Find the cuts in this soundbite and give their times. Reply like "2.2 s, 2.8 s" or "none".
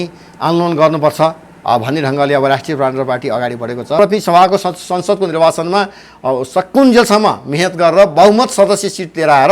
4.0 s